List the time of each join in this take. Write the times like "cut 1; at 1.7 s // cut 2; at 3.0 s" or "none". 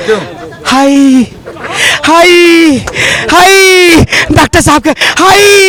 none